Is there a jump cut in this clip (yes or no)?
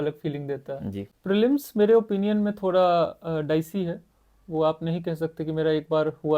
yes